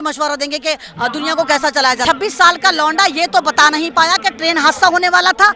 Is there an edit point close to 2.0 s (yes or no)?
yes